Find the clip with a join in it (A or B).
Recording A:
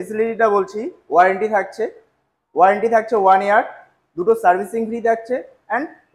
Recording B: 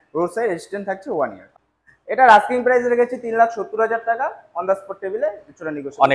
B